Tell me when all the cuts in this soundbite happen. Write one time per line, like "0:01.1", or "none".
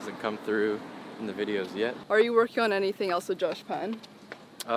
0:02.0